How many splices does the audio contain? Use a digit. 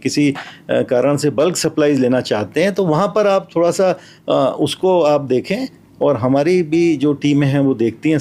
0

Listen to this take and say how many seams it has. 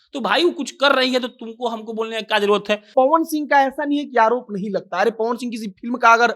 1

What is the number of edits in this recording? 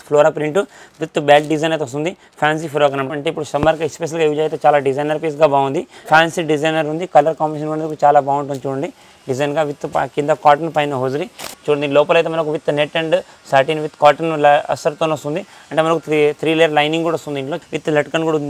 4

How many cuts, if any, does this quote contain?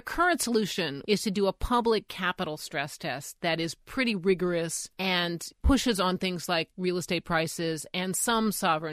2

